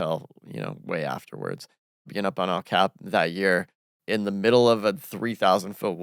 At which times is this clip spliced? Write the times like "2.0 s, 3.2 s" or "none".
2.1 s, 3.9 s